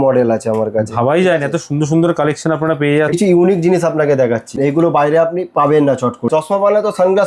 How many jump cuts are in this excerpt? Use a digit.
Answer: 3